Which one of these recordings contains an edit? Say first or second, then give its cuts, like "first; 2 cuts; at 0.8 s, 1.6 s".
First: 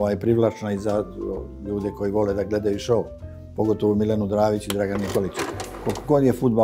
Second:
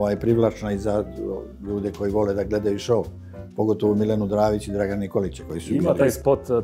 first; 1 cut; at 5.5 s